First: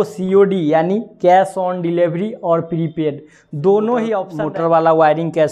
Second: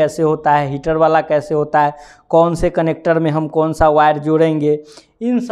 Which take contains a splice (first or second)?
first